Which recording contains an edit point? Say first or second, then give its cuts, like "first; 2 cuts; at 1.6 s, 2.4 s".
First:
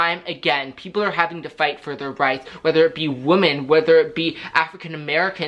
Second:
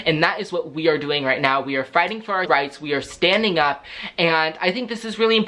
second; 1 cut; at 2.5 s